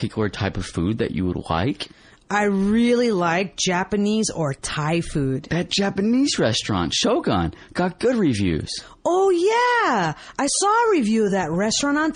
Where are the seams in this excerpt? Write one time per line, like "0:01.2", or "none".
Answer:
none